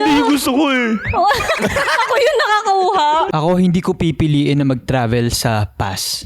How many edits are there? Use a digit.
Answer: 1